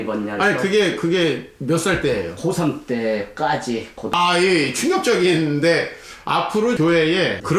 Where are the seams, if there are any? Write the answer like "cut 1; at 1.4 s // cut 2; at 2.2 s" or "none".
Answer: cut 1; at 4.1 s